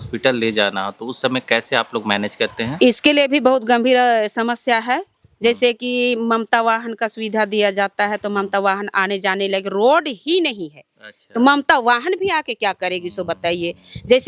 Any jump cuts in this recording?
no; 0 cuts

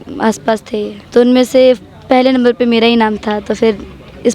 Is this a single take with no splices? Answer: no; 1 cut; at 1.0 s

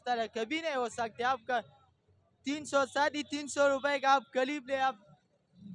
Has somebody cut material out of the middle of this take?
no; 0 cuts

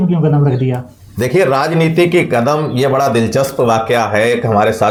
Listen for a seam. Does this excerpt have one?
no; 0 cuts

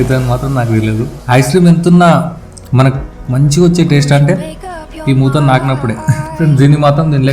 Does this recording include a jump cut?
yes; 2 cuts; at 1.2 s, 5.8 s

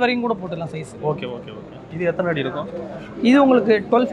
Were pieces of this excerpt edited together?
no; 0 cuts

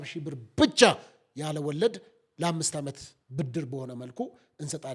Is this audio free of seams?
yes; 0 cuts

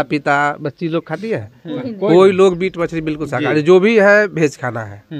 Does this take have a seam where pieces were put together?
no; 0 cuts

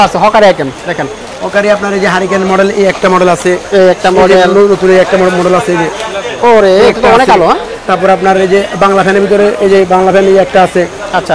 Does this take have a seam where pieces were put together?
no; 0 cuts

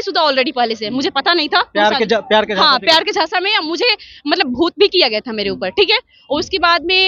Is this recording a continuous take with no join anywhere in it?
yes; 0 cuts

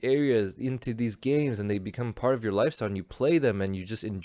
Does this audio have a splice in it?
no; 0 cuts

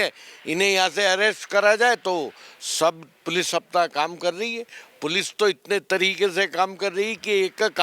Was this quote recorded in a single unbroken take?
yes; 0 cuts

